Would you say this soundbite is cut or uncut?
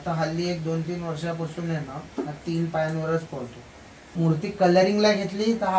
cut